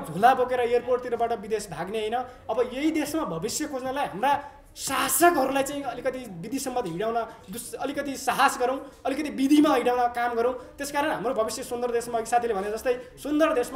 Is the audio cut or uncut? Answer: uncut